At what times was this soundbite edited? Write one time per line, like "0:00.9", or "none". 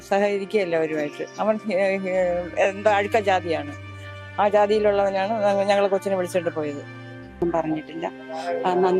0:07.4